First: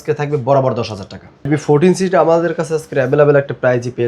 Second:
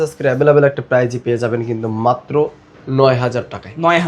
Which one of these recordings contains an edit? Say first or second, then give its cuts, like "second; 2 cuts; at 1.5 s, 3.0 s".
first; 1 cut; at 1.5 s